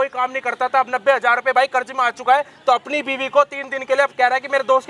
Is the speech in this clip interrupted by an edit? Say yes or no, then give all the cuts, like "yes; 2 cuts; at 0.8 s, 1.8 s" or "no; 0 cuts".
no; 0 cuts